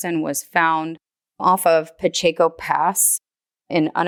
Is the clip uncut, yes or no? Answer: yes